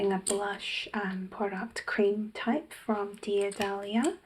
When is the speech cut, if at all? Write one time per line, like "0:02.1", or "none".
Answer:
none